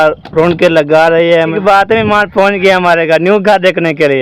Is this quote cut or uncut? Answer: cut